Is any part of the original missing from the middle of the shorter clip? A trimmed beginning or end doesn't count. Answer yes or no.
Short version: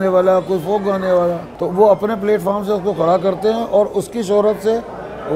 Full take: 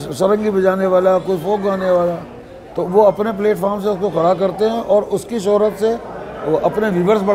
yes